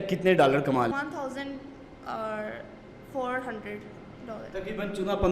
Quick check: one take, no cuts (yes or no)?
no